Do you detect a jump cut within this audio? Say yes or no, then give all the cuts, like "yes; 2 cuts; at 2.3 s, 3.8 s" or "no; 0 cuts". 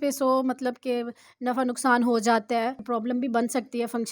yes; 1 cut; at 2.8 s